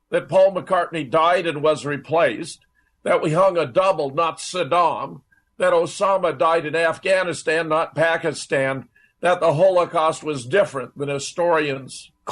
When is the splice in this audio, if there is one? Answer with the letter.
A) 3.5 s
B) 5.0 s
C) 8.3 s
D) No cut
B